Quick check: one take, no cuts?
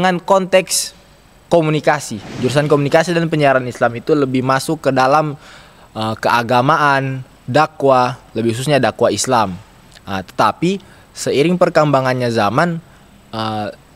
no; 1 cut; at 2.4 s

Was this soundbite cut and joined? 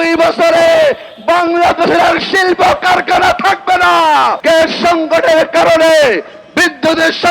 yes; 1 cut; at 4.4 s

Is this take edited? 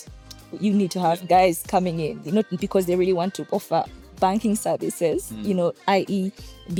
no; 0 cuts

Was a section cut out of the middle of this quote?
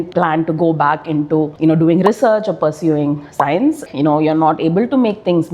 yes; 1 cut; at 3.8 s

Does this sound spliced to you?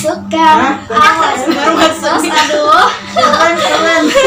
no; 0 cuts

